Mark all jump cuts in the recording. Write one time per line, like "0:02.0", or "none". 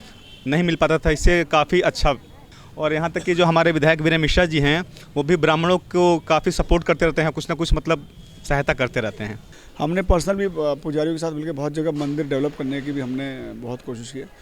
0:02.6
0:09.4